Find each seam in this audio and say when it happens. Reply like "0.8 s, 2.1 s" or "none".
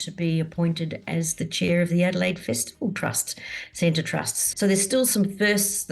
4.4 s